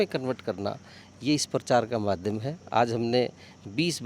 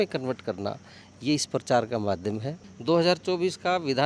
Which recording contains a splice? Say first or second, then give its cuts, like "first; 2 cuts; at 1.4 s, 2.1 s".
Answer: second; 1 cut; at 2.5 s